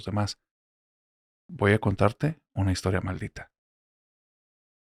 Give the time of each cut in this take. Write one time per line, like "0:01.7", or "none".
none

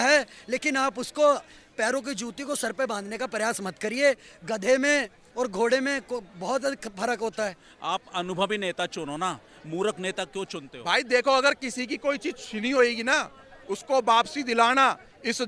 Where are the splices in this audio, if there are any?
0:07.7
0:10.7

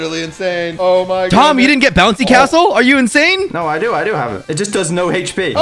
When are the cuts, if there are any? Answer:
none

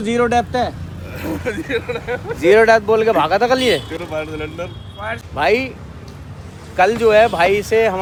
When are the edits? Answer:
none

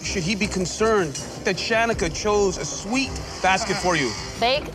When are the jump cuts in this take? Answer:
0:02.2

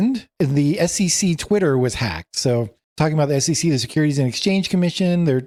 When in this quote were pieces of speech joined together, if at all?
none

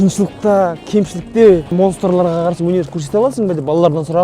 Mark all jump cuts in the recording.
0:01.7

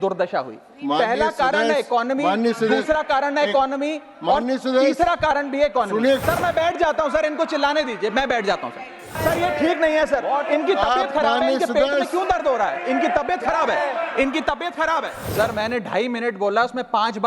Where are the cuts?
0:06.2
0:09.2
0:15.2

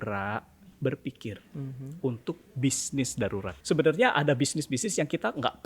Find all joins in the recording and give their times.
0:03.5

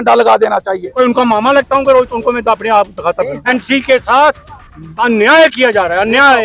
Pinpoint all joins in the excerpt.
0:00.9
0:03.4

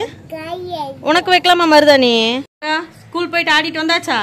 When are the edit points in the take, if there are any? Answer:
0:02.6

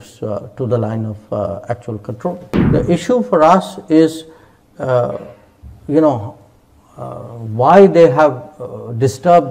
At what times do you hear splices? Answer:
0:02.5

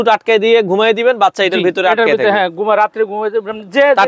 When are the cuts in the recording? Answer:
none

